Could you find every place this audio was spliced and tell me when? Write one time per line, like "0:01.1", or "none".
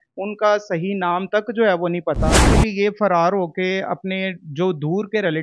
0:02.5